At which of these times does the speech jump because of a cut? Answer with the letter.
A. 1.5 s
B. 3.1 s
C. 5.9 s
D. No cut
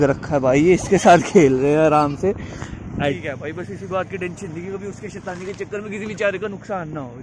B